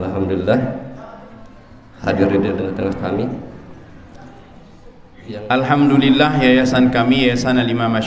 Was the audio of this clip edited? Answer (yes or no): yes